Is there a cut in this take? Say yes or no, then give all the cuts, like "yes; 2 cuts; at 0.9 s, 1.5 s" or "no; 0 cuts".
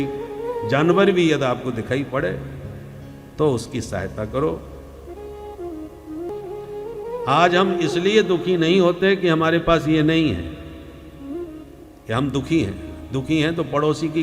yes; 1 cut; at 6.3 s